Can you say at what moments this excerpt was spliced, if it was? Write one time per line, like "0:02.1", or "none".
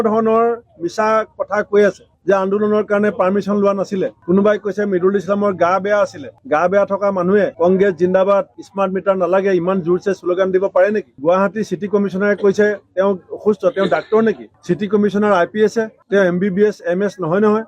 0:06.3
0:11.2

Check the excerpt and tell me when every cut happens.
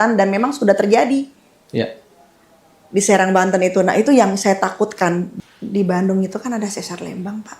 0:05.3

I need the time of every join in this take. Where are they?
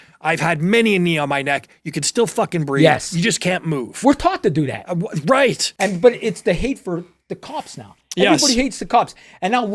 0:05.7

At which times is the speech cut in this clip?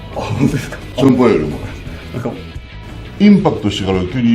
0:02.6

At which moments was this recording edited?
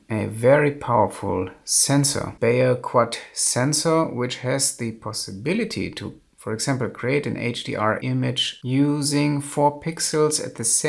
0:02.3
0:08.2

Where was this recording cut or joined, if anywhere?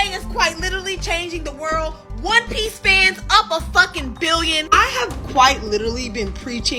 none

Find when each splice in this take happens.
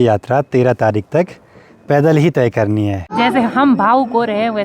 0:03.0

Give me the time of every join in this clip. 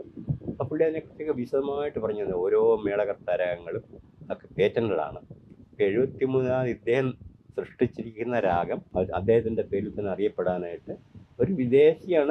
0:08.8

